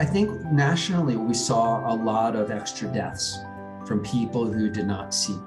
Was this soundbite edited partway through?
no; 0 cuts

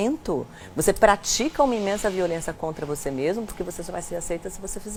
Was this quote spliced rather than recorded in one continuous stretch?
no; 0 cuts

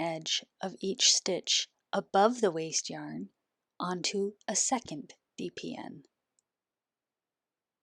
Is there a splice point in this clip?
no; 0 cuts

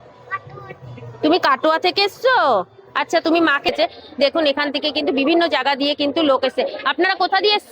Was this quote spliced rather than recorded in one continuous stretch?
yes; 1 cut; at 3.7 s

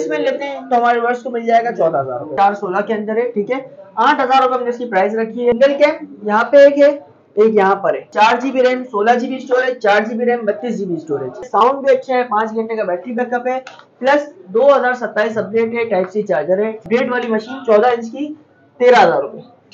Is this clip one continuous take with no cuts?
no; 5 cuts; at 2.3 s, 5.5 s, 8.1 s, 11.5 s, 16.8 s

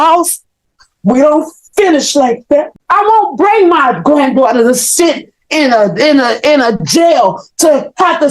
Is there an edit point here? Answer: yes; 1 cut; at 2.7 s

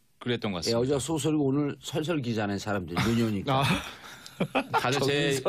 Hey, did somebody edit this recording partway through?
no; 0 cuts

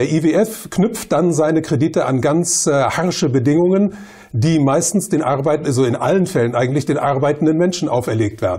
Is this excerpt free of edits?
no; 1 cut; at 3.8 s

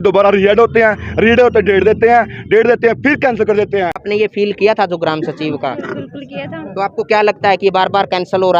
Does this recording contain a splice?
yes; 1 cut; at 4.0 s

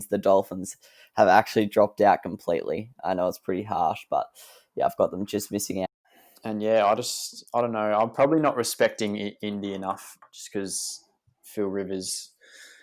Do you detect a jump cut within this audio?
yes; 1 cut; at 5.9 s

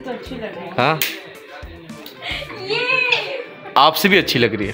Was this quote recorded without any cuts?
yes; 0 cuts

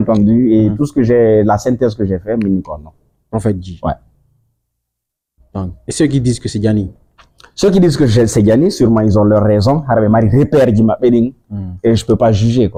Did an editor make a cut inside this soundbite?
no; 0 cuts

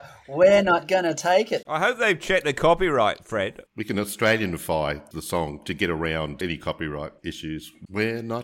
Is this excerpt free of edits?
no; 5 cuts; at 1.6 s, 3.7 s, 5.1 s, 6.4 s, 7.4 s

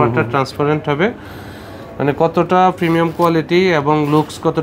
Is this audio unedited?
yes; 0 cuts

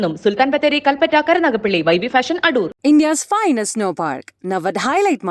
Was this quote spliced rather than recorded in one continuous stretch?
no; 0 cuts

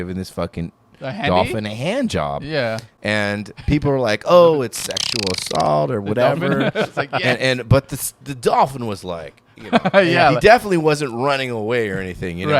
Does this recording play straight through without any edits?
yes; 0 cuts

